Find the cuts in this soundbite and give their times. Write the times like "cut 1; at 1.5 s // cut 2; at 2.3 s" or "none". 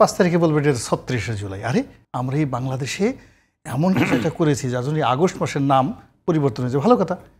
cut 1; at 2.0 s